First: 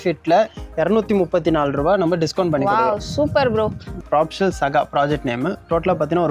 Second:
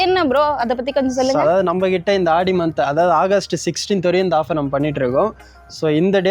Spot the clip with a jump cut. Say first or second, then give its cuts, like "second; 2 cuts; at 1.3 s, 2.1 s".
first; 1 cut; at 4.0 s